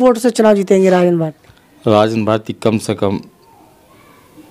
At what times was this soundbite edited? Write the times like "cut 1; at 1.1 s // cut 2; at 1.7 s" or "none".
none

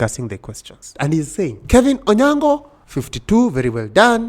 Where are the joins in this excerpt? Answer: cut 1; at 0.9 s // cut 2; at 1.6 s

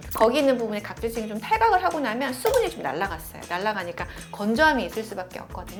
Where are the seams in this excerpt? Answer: none

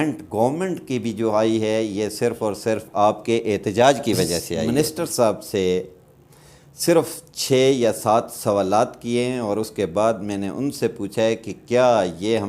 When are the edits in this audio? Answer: cut 1; at 4.7 s

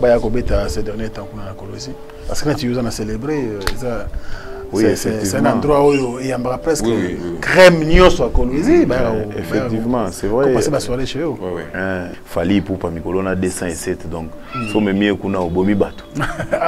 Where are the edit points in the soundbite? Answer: cut 1; at 12.1 s

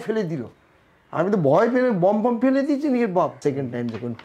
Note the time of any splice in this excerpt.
cut 1; at 3.4 s

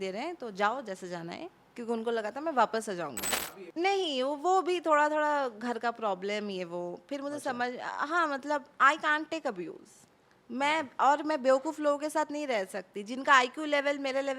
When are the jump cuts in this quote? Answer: cut 1; at 3.2 s

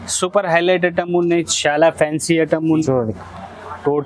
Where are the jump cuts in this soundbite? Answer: cut 1; at 2.8 s

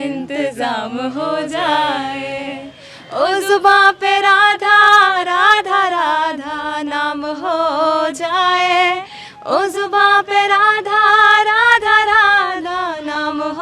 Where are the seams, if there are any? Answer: none

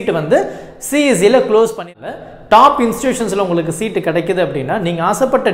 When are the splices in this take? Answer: cut 1; at 2.0 s

